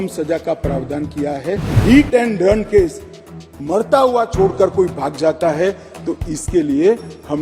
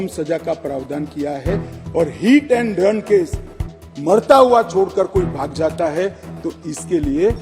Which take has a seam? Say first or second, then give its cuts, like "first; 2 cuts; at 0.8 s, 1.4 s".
first; 1 cut; at 1.8 s